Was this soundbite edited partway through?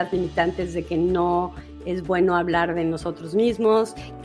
no; 0 cuts

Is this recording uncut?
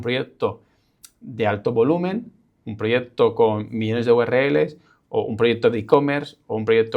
yes; 0 cuts

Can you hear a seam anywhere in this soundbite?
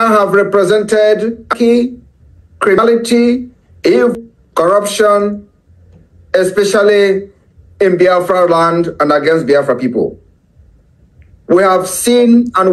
yes; 3 cuts; at 1.5 s, 2.8 s, 4.1 s

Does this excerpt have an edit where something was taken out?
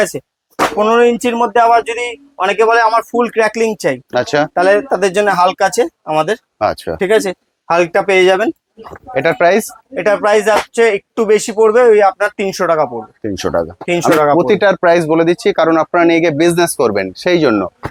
no; 0 cuts

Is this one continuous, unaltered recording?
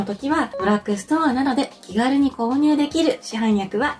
yes; 0 cuts

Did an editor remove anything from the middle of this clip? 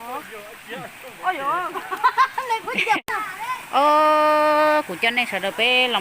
yes; 1 cut; at 3.0 s

